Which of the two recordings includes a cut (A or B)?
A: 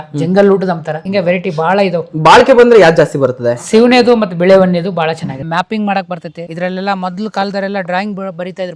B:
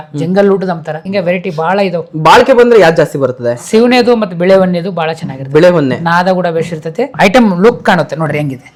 A